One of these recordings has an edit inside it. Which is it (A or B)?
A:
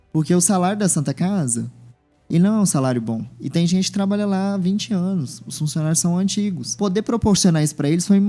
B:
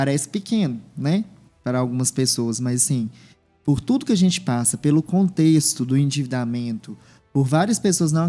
A